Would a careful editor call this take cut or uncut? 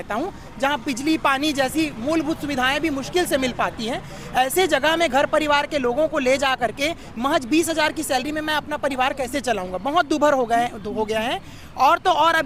uncut